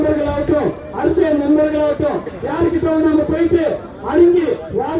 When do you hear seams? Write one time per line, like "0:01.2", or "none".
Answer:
none

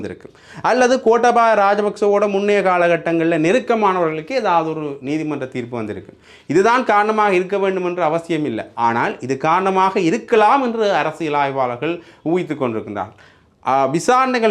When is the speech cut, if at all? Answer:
none

